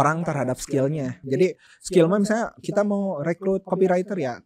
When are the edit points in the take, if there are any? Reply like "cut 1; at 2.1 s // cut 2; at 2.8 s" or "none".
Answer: cut 1; at 1.2 s

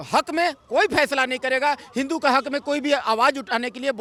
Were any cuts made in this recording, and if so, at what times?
none

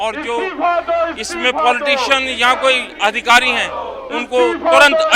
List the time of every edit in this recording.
none

